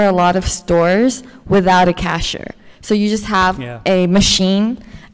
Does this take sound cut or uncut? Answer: uncut